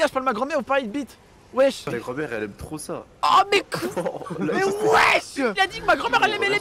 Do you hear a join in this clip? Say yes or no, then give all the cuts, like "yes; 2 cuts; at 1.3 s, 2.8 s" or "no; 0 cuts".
yes; 2 cuts; at 1.9 s, 5.5 s